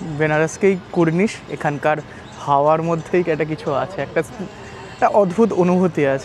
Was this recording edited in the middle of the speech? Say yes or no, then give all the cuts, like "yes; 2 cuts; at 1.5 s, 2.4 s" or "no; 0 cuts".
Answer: no; 0 cuts